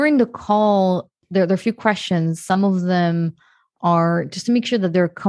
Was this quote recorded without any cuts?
no; 1 cut; at 1.2 s

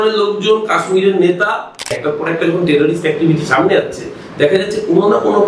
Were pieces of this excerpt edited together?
yes; 1 cut; at 2.0 s

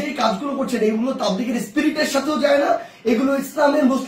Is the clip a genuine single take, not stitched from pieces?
yes; 0 cuts

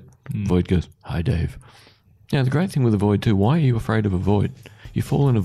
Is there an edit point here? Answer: yes; 1 cut; at 2.1 s

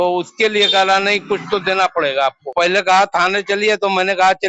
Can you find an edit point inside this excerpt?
yes; 1 cut; at 2.4 s

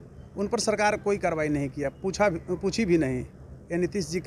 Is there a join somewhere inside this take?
no; 0 cuts

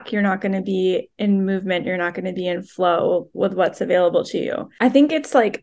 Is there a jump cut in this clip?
yes; 1 cut; at 4.6 s

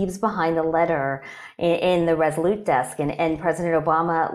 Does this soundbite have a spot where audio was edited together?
no; 0 cuts

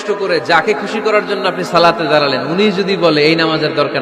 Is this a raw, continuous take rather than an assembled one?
yes; 0 cuts

